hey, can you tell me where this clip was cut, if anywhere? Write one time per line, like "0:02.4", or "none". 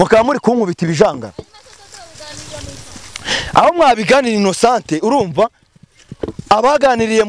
none